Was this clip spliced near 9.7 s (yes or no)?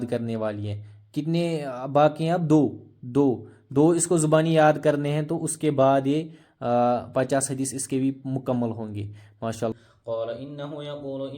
yes